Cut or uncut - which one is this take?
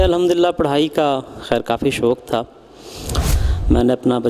cut